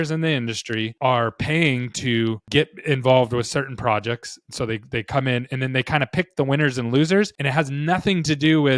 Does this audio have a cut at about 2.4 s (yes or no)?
yes